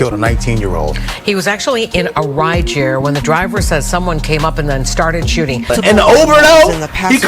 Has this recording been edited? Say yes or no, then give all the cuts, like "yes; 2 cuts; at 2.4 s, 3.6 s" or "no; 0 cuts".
yes; 1 cut; at 5.7 s